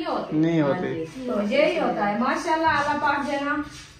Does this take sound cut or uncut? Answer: uncut